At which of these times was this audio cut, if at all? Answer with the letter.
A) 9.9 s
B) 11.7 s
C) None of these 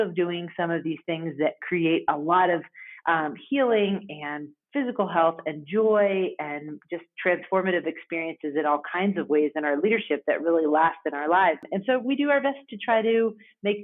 B